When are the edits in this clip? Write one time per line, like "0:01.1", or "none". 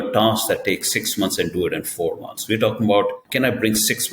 0:03.2